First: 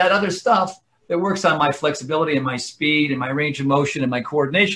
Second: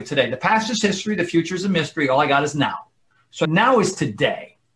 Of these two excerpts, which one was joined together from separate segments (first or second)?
second